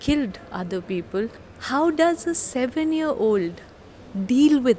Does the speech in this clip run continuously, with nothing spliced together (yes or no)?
no